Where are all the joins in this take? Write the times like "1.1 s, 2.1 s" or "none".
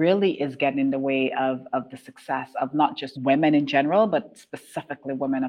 3.1 s